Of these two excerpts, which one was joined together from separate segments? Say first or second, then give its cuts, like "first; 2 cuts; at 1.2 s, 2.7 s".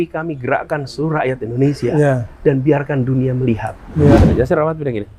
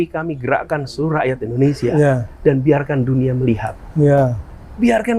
first; 1 cut; at 4.2 s